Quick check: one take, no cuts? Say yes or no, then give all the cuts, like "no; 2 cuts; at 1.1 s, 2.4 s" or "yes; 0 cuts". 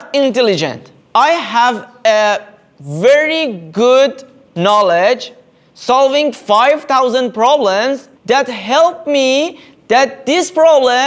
yes; 0 cuts